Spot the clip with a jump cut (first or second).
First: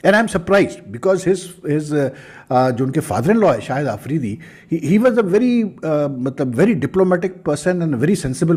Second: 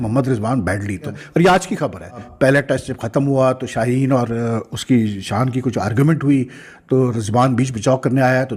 second